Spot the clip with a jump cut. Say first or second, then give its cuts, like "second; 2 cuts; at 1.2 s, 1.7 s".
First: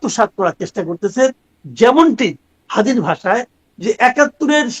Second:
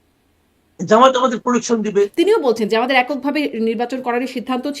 second; 1 cut; at 2.1 s